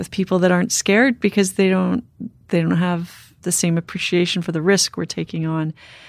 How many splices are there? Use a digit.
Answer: 0